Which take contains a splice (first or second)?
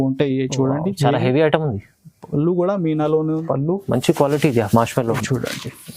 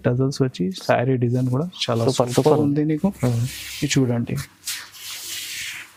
first